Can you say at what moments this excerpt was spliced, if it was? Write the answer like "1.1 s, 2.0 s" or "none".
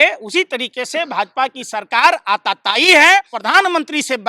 3.4 s

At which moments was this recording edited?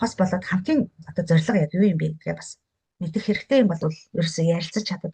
3.8 s

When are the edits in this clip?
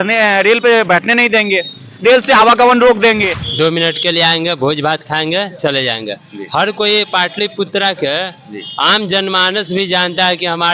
3.4 s

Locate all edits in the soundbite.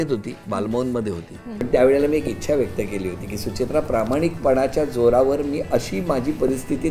1.6 s

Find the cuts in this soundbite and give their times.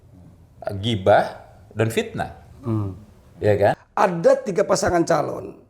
3.8 s

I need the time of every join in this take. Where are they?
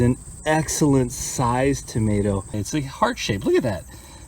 2.6 s

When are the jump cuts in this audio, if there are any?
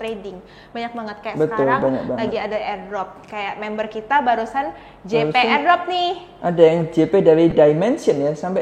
none

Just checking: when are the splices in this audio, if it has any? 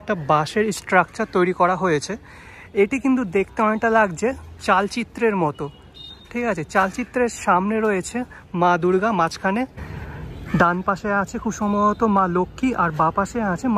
none

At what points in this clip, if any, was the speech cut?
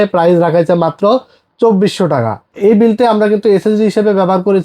2.5 s

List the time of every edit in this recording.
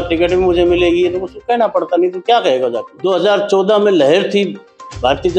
2.9 s

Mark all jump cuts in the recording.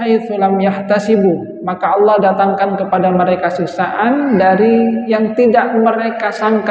none

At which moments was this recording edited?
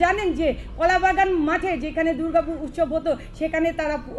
none

